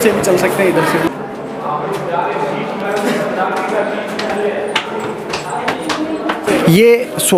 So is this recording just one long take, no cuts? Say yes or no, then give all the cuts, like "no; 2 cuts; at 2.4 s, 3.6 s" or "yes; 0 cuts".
yes; 0 cuts